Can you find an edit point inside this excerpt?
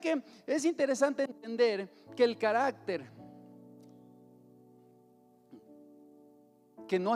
no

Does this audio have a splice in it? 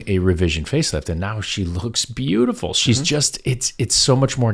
no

